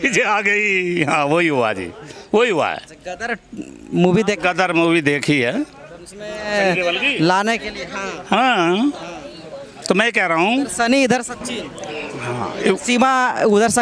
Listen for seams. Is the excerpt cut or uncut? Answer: uncut